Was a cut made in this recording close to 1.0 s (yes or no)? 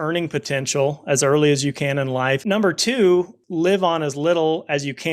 no